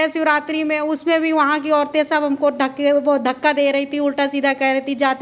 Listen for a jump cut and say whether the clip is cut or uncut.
uncut